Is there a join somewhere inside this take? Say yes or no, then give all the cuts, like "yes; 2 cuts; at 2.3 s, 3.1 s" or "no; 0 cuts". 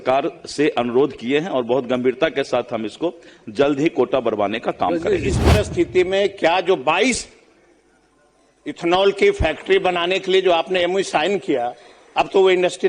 yes; 1 cut; at 5.4 s